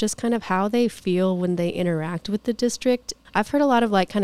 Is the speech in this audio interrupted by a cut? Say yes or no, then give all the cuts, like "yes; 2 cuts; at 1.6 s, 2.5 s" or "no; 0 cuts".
yes; 1 cut; at 3.1 s